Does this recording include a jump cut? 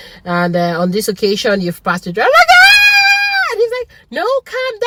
no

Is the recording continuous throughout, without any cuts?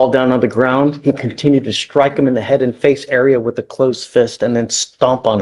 yes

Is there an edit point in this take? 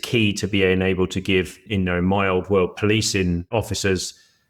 yes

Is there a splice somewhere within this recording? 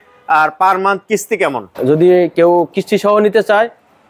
yes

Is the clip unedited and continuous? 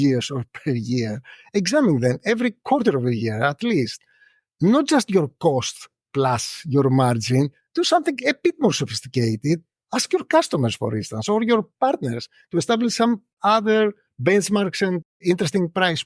no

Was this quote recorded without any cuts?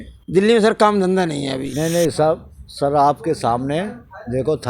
no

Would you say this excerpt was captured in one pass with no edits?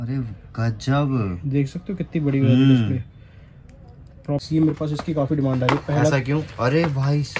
no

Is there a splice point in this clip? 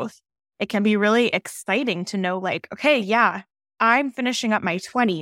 no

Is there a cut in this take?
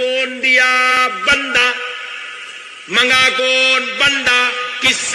yes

